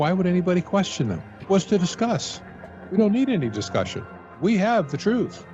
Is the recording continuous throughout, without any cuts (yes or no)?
no